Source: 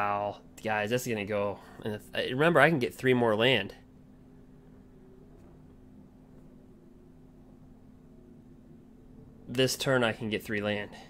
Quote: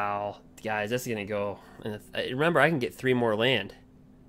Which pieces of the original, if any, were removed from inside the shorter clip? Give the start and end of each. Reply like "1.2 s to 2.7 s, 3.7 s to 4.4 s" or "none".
none